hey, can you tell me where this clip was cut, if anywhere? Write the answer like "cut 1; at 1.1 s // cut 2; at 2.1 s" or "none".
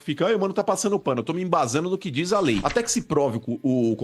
cut 1; at 2.6 s